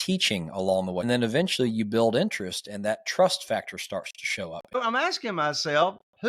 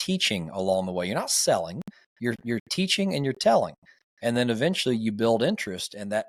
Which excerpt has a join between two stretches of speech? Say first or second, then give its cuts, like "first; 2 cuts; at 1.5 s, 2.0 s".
first; 2 cuts; at 1.0 s, 4.8 s